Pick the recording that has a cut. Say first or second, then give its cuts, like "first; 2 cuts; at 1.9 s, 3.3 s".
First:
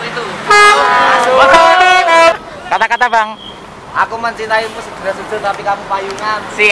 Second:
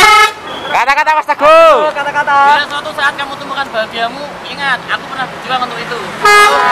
first; 1 cut; at 2.3 s